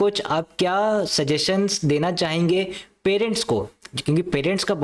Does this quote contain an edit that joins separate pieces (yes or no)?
no